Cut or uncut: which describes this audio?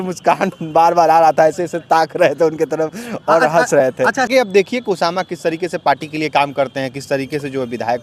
cut